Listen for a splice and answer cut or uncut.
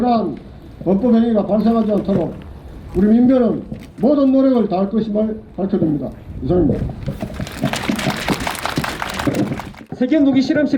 cut